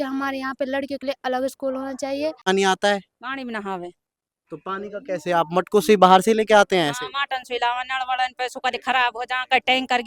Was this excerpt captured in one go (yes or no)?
no